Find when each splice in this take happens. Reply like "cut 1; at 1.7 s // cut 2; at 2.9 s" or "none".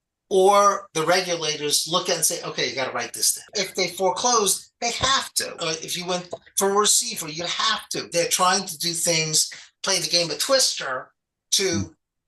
cut 1; at 3.5 s // cut 2; at 5.6 s // cut 3; at 8.1 s